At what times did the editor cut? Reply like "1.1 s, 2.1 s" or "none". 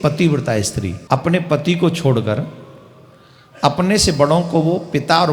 0.9 s